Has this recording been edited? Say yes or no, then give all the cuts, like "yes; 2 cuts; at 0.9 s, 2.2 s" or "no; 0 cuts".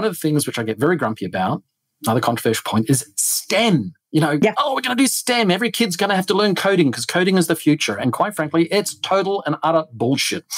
no; 0 cuts